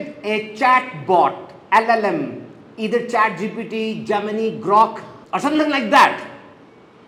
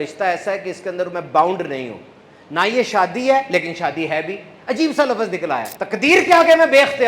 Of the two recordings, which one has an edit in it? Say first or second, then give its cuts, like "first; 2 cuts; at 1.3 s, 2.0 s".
second; 1 cut; at 5.7 s